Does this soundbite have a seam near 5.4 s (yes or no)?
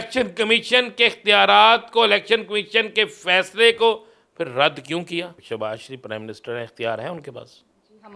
yes